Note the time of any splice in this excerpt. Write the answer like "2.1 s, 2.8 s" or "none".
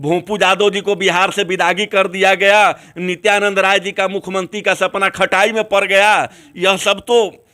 none